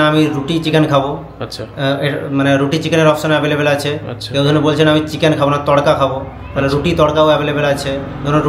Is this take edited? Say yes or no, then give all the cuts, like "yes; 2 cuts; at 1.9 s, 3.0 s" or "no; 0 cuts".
no; 0 cuts